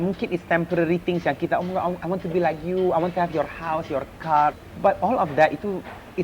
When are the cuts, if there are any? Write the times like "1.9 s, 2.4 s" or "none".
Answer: 4.7 s